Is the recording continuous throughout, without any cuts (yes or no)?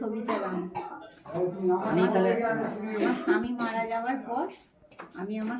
yes